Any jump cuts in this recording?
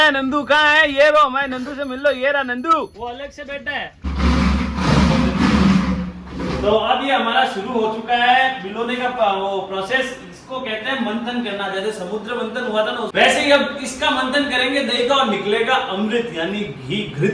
yes; 2 cuts; at 4.0 s, 13.1 s

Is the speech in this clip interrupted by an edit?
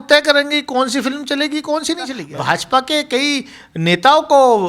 yes; 1 cut; at 2.2 s

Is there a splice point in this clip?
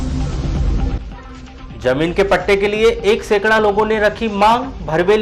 yes; 1 cut; at 0.9 s

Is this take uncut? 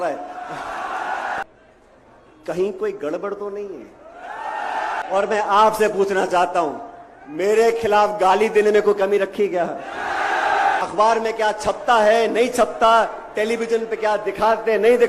no; 3 cuts; at 1.4 s, 5.0 s, 10.8 s

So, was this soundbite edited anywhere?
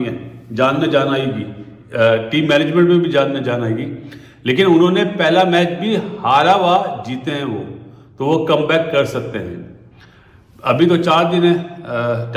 no; 0 cuts

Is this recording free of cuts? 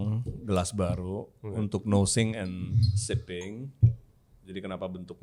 yes; 0 cuts

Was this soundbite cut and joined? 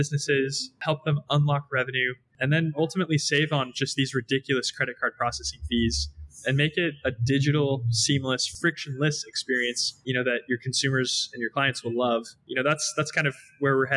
yes; 5 cuts; at 0.8 s, 2.3 s, 8.5 s, 9.9 s, 12.4 s

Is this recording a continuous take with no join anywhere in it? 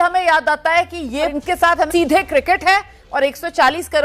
no; 1 cut; at 1.3 s

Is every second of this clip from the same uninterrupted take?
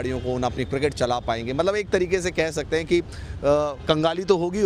yes; 0 cuts

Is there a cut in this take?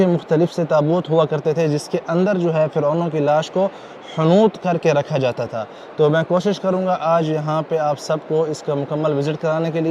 no; 0 cuts

